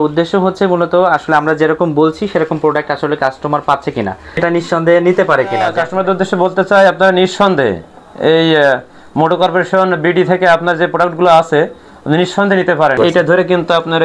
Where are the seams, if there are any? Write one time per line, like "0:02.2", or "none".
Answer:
0:04.4
0:05.8
0:13.0